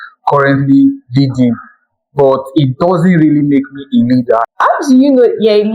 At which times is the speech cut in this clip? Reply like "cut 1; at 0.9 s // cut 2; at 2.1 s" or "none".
cut 1; at 4.5 s